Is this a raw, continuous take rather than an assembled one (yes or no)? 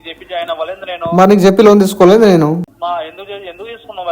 no